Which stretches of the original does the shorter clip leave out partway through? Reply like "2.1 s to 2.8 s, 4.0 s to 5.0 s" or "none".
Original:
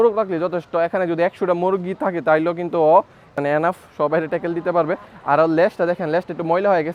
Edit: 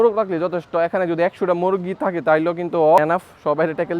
3.0 s to 3.5 s